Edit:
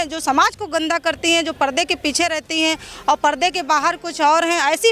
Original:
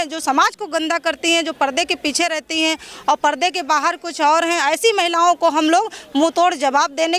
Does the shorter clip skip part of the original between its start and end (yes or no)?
no